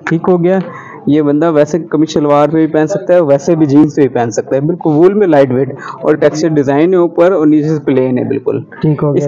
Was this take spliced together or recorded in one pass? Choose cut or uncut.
uncut